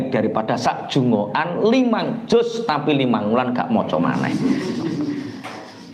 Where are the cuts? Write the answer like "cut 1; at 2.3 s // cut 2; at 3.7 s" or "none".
none